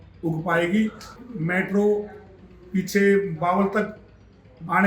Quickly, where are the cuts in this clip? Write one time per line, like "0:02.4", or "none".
0:01.2